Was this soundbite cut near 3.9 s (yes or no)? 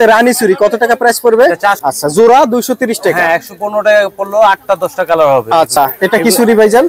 no